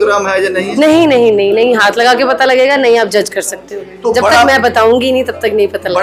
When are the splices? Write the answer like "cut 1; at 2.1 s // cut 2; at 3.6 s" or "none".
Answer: none